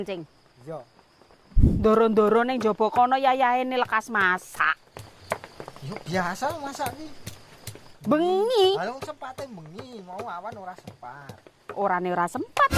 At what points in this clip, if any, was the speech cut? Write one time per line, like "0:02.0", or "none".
0:01.7